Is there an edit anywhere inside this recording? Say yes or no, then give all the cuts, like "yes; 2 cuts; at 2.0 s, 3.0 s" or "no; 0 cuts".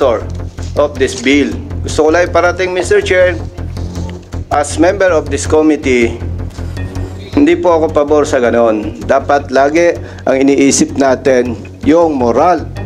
no; 0 cuts